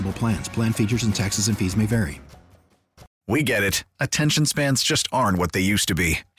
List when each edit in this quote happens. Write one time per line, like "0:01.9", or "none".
0:03.1